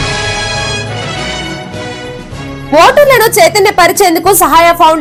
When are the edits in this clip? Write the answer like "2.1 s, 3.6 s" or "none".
none